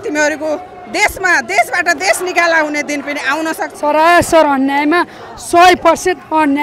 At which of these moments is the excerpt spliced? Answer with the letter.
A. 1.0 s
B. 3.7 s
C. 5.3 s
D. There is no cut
B